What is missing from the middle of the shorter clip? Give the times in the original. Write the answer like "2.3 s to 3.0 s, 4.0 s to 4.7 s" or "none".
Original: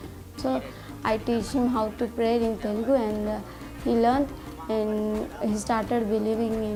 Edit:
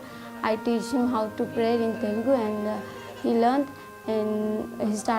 none